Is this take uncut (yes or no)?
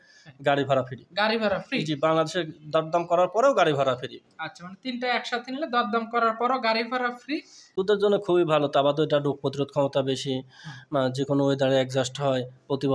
no